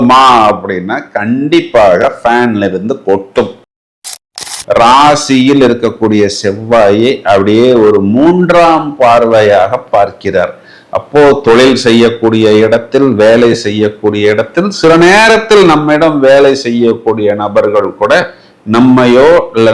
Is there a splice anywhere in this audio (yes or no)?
yes